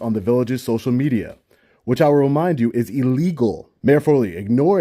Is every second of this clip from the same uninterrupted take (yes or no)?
no